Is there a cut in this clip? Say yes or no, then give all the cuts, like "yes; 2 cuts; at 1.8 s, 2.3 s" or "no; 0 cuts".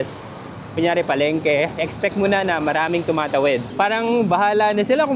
yes; 1 cut; at 3.6 s